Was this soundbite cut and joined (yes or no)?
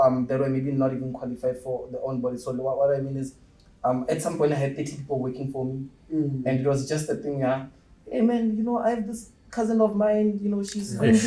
no